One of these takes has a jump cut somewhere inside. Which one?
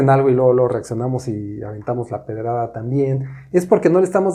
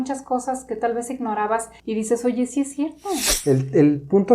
second; 2 cuts; at 1.8 s, 3.2 s

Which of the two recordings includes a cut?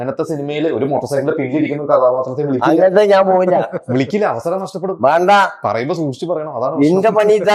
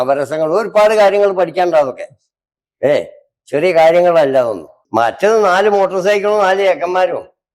second; 1 cut; at 4.8 s

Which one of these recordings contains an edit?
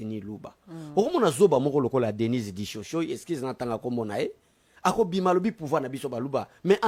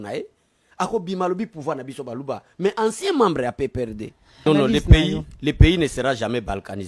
second; 1 cut; at 4.5 s

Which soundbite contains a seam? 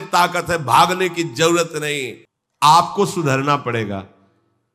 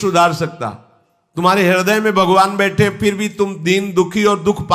first; 1 cut; at 2.1 s

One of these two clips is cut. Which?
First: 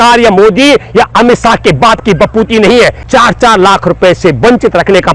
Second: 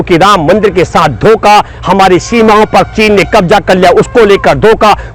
first; 1 cut; at 3.0 s

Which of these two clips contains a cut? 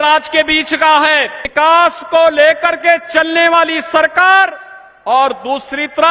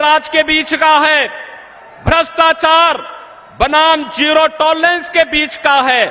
first; 1 cut; at 1.4 s

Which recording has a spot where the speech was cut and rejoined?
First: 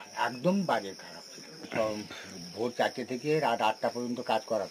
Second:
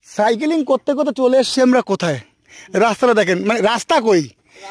first; 1 cut; at 1.6 s

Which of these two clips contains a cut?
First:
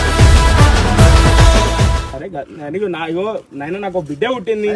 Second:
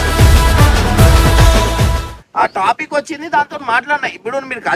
second; 1 cut; at 2.2 s

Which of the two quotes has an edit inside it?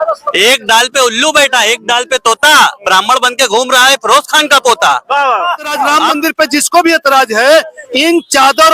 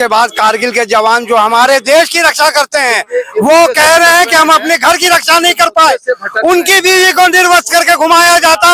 first; 1 cut; at 6.0 s

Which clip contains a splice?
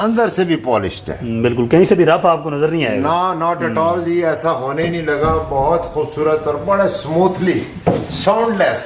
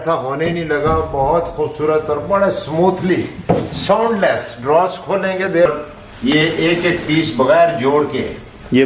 second; 1 cut; at 5.7 s

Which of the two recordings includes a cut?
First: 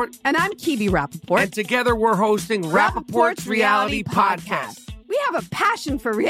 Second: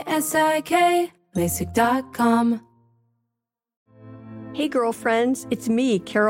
second; 1 cut; at 3.6 s

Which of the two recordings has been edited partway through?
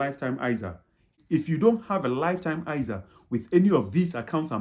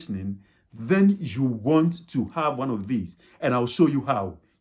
first; 1 cut; at 1.2 s

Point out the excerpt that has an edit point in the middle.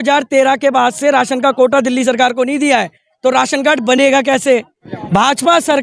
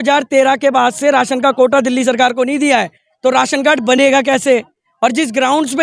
first; 1 cut; at 4.8 s

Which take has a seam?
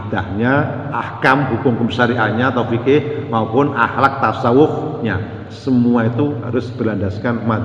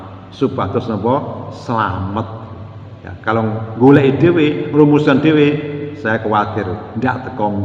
first; 1 cut; at 1.0 s

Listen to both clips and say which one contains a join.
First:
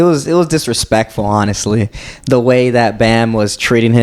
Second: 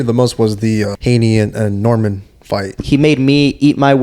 second; 2 cuts; at 0.9 s, 2.8 s

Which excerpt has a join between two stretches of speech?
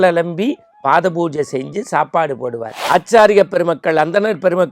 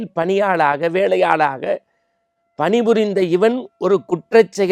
first; 1 cut; at 2.7 s

